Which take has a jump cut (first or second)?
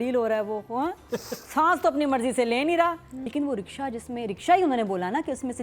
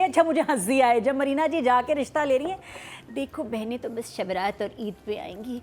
first